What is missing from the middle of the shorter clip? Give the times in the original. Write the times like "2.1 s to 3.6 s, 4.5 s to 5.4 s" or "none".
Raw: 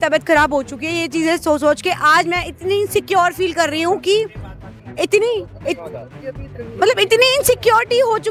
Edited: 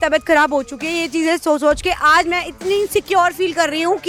none